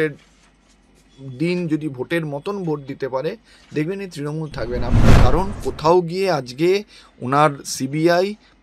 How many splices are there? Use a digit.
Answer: 1